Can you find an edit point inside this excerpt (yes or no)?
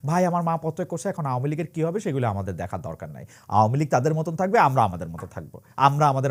no